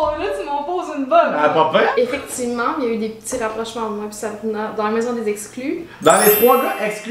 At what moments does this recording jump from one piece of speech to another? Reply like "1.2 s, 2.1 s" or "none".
1.9 s, 5.9 s